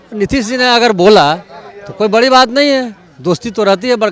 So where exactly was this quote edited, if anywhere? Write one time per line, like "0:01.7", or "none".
none